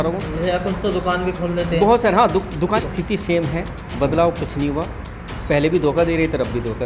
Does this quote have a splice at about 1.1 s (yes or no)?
no